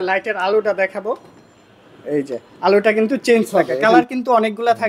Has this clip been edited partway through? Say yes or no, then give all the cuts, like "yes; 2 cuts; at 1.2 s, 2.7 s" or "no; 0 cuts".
yes; 1 cut; at 3.8 s